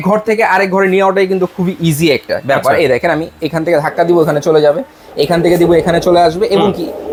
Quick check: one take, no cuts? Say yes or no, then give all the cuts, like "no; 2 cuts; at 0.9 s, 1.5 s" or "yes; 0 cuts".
yes; 0 cuts